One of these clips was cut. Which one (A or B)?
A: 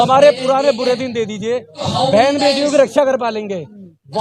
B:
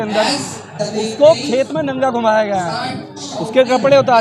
A